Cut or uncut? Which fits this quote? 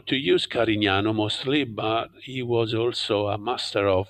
uncut